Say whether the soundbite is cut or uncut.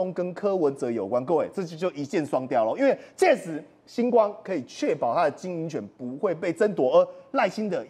uncut